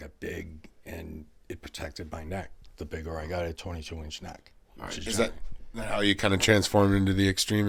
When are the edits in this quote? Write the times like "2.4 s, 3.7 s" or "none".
none